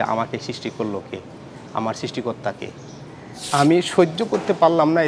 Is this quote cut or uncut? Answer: cut